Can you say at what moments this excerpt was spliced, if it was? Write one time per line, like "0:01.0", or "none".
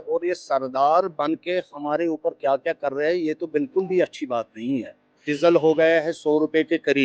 0:05.2